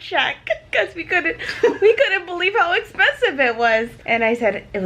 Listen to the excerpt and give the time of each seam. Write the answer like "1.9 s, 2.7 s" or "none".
4.0 s